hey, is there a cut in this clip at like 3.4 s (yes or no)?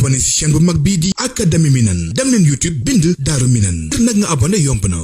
no